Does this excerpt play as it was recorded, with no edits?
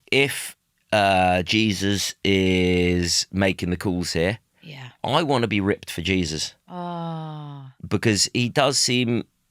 yes; 0 cuts

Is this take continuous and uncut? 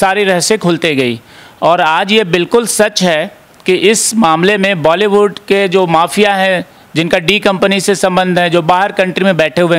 yes; 0 cuts

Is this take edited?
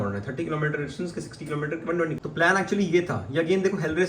yes; 1 cut; at 2.2 s

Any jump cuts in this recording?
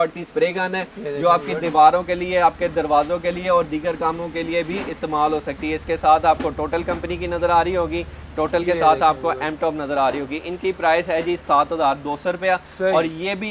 no; 0 cuts

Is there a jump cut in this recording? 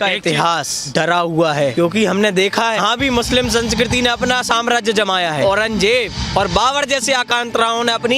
yes; 2 cuts; at 2.8 s, 5.4 s

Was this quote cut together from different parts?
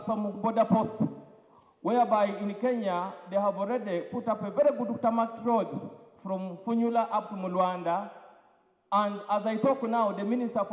no; 0 cuts

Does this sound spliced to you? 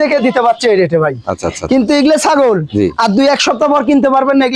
no; 0 cuts

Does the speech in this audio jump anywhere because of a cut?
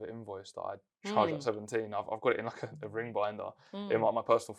no; 0 cuts

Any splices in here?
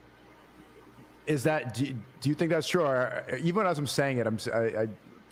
no; 0 cuts

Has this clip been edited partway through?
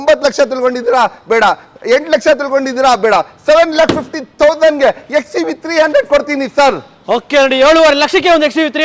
no; 0 cuts

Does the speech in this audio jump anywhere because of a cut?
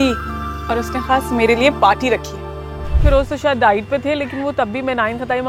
yes; 1 cut; at 2.7 s

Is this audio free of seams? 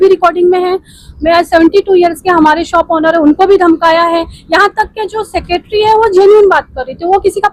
yes; 0 cuts

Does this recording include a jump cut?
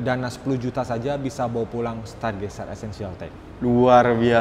no; 0 cuts

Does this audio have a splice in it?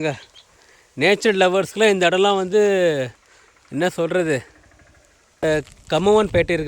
yes; 1 cut; at 5.4 s

